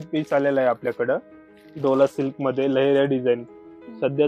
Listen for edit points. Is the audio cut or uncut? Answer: uncut